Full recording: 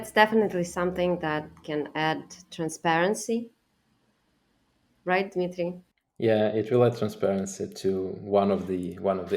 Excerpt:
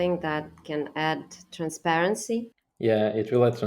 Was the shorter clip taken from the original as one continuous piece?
no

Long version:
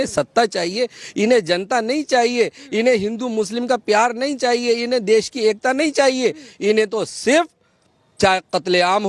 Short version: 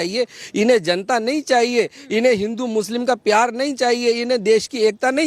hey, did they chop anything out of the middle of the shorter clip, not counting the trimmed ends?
no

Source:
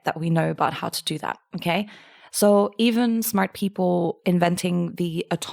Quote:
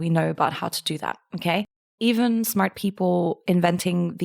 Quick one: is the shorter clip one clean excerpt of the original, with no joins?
no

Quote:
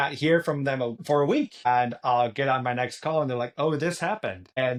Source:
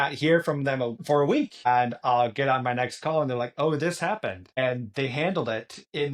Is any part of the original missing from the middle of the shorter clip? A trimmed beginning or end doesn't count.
no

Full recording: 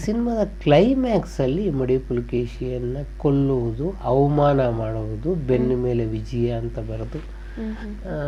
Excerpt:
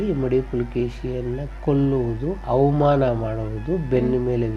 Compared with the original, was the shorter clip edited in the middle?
no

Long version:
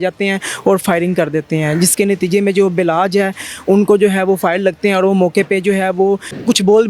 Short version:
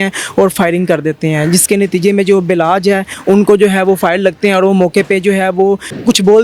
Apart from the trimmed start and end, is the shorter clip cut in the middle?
yes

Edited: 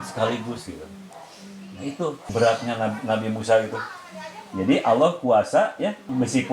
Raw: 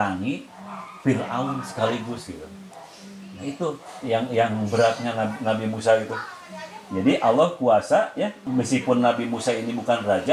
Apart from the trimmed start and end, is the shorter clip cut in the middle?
yes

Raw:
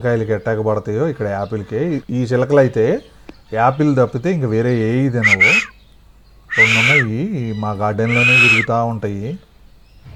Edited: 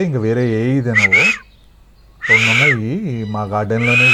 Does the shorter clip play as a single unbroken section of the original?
yes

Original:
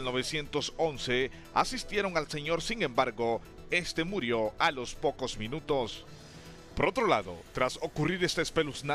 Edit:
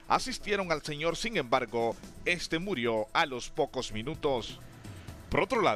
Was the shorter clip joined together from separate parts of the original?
no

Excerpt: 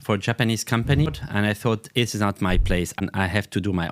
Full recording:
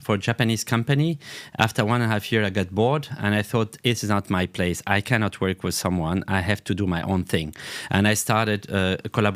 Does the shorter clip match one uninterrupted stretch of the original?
no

